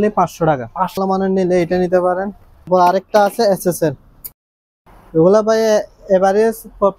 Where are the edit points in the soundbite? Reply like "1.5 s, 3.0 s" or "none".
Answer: 1.0 s, 2.7 s, 4.2 s